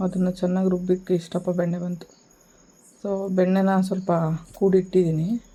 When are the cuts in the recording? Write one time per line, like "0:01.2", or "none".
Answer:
none